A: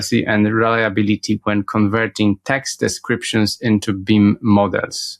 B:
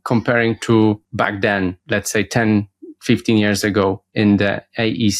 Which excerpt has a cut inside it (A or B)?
B